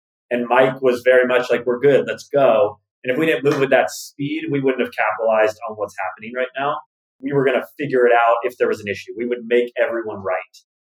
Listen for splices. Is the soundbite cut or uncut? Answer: cut